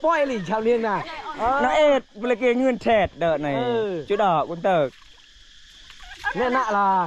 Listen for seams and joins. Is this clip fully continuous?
yes; 0 cuts

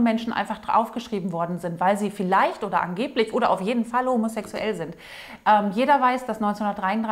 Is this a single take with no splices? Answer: yes; 0 cuts

